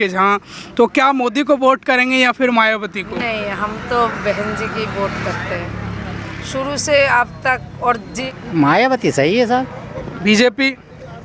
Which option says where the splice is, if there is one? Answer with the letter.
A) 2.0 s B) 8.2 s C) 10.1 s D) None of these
B